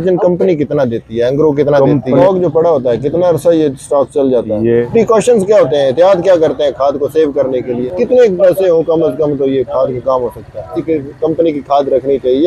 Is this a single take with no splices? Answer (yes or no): no